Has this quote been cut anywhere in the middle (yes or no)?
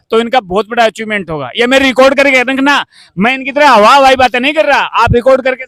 no